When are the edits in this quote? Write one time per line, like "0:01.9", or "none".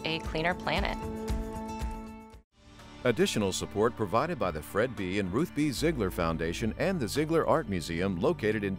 0:02.8